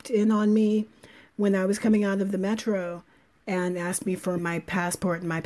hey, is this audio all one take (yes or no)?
no